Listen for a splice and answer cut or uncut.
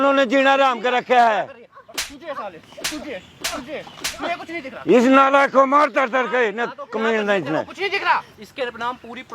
cut